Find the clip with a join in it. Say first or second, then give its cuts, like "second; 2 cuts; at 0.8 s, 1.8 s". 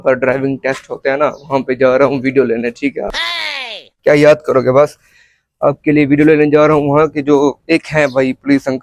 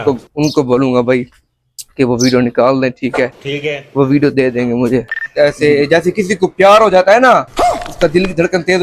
second; 1 cut; at 5.2 s